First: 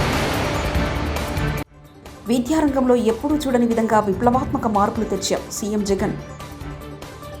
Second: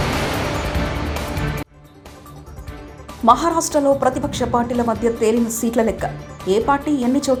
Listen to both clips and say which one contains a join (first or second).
first